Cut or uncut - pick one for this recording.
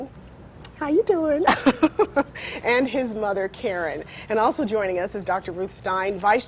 cut